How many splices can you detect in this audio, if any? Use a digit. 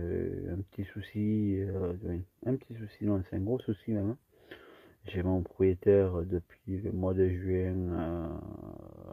0